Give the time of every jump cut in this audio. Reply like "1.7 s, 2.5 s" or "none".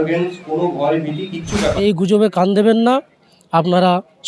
1.8 s